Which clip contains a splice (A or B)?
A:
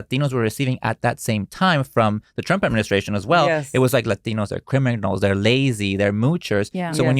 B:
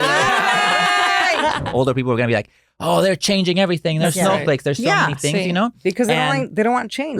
B